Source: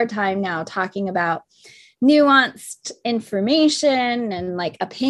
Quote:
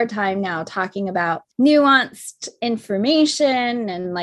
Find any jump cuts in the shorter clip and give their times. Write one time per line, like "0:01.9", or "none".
0:01.5